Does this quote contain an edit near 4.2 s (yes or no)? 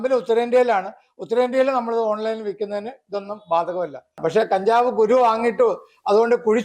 yes